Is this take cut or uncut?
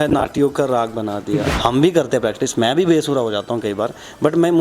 cut